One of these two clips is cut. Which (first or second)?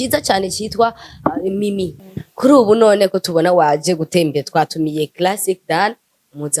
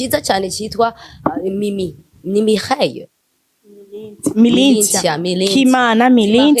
first